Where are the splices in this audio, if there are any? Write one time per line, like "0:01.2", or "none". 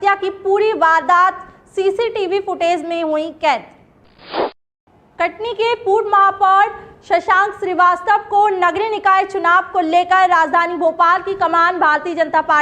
0:04.4